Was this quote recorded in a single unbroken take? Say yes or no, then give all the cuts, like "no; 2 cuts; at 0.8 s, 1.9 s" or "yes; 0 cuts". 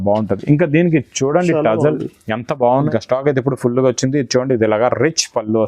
no; 1 cut; at 2.9 s